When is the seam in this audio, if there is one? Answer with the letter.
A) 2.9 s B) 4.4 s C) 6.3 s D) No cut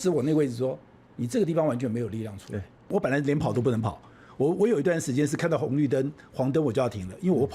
A